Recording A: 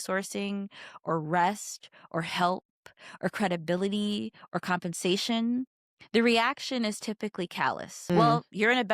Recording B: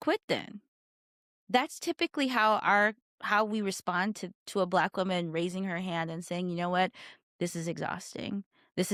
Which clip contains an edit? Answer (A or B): A